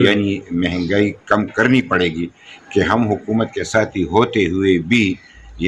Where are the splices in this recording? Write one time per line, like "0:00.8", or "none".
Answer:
0:02.5